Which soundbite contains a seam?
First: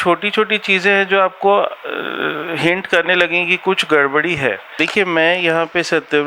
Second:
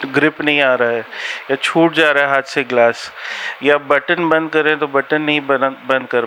first; 1 cut; at 4.7 s

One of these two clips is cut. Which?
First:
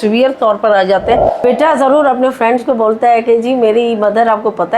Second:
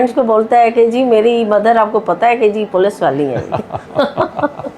first; 1 cut; at 1.4 s

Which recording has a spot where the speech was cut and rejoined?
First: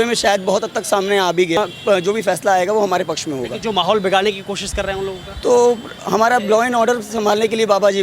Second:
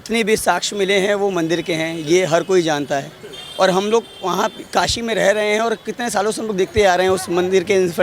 first; 1 cut; at 1.6 s

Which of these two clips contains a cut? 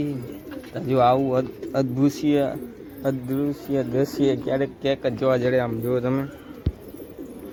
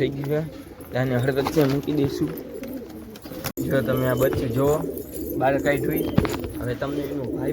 second; 1 cut; at 3.5 s

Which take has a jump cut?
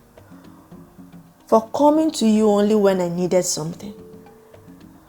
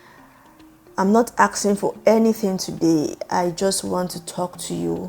first; 1 cut; at 4.0 s

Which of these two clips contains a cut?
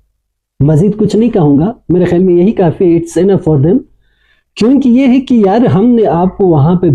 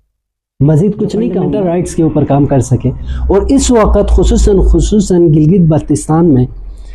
second; 1 cut; at 1.4 s

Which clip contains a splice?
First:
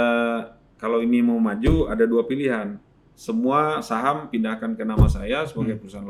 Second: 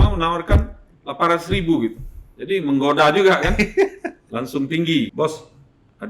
second; 1 cut; at 5.1 s

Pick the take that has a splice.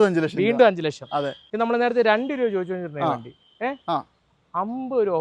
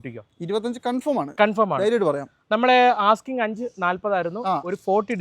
first; 1 cut; at 1.4 s

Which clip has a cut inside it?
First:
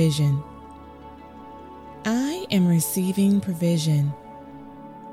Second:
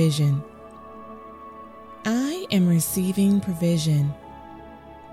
first; 1 cut; at 4.1 s

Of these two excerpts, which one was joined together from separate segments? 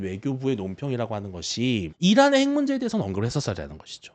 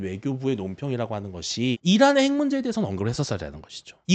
second; 1 cut; at 1.8 s

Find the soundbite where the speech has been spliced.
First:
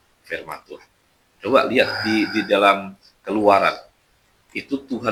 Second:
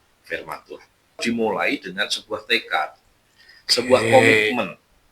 second; 1 cut; at 1.2 s

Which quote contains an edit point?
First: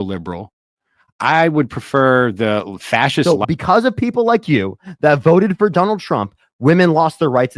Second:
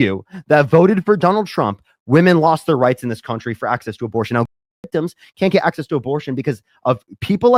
first; 1 cut; at 3.2 s

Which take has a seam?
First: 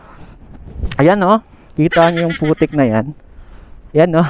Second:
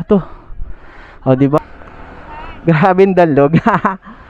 second; 1 cut; at 1.6 s

